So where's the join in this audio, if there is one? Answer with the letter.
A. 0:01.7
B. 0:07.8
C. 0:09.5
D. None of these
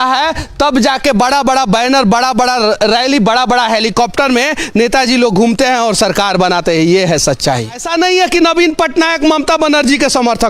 B